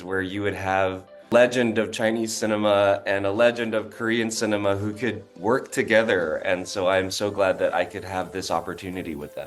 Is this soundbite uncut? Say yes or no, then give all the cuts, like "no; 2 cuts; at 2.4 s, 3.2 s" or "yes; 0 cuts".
yes; 0 cuts